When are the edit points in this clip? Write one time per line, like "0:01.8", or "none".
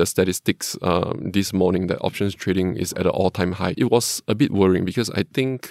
0:03.8